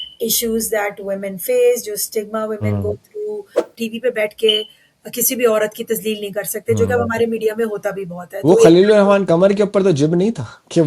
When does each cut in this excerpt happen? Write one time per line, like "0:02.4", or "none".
0:03.7